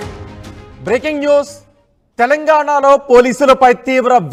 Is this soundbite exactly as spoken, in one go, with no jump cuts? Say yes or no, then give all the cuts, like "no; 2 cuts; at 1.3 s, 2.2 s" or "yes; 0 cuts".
yes; 0 cuts